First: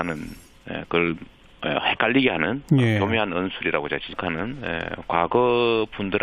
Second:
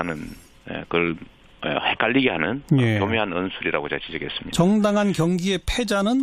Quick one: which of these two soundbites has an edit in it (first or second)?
second